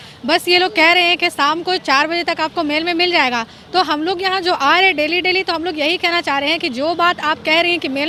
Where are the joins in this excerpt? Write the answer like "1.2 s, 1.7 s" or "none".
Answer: none